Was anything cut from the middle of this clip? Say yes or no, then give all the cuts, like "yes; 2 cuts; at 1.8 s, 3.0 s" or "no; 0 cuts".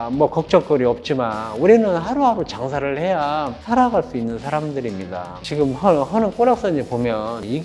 yes; 2 cuts; at 3.6 s, 5.4 s